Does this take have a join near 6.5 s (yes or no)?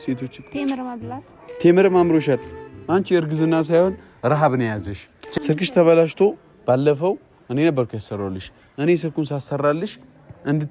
no